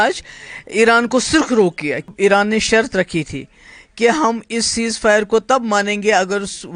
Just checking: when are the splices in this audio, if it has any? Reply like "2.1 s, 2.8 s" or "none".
2.1 s